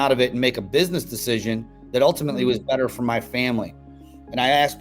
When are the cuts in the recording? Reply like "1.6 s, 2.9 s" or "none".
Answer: none